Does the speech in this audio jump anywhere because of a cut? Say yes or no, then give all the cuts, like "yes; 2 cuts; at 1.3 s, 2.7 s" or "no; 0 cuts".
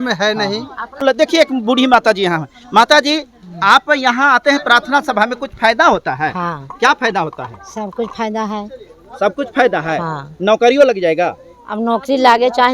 yes; 1 cut; at 1.0 s